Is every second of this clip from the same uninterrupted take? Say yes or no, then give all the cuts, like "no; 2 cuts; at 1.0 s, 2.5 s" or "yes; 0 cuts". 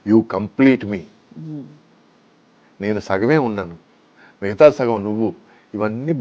yes; 0 cuts